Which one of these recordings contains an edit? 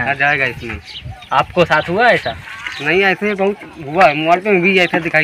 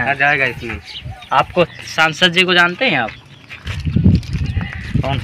second; 1 cut; at 1.7 s

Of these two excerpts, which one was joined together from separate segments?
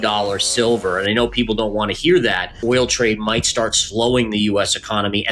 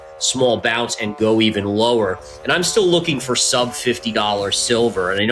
first; 1 cut; at 2.6 s

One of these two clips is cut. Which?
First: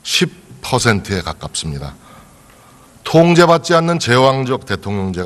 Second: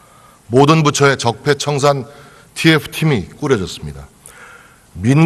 first; 1 cut; at 1.9 s

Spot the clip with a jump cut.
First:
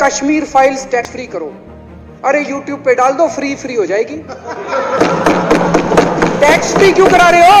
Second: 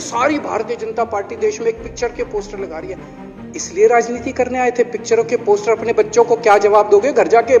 first; 1 cut; at 1.0 s

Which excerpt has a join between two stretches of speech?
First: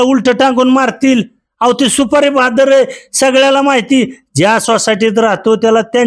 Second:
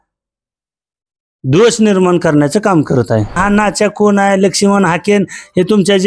second; 1 cut; at 3.4 s

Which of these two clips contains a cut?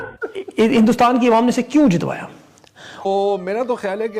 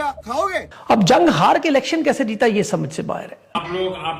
first; 1 cut; at 3.1 s

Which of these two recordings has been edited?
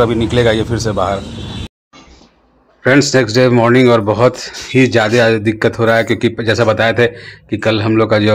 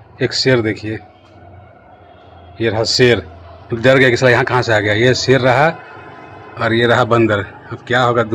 first; 1 cut; at 1.6 s

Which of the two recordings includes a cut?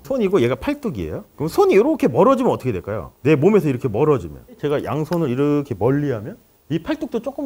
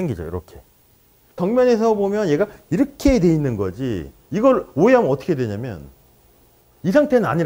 second; 1 cut; at 1.4 s

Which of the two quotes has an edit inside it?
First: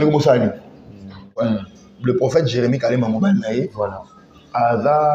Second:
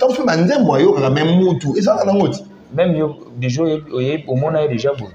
first; 1 cut; at 1.4 s

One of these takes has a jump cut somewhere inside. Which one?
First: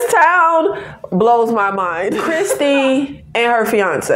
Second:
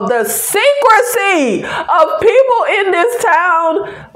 first; 1 cut; at 2.2 s

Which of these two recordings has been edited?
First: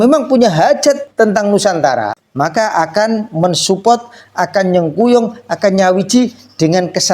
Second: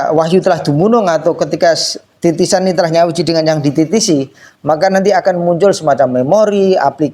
first; 2 cuts; at 1.1 s, 2.2 s

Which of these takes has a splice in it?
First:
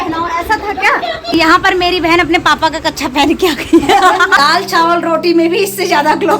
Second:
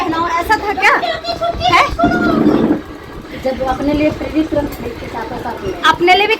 first; 2 cuts; at 1.2 s, 4.3 s

